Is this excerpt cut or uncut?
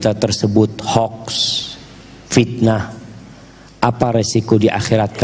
uncut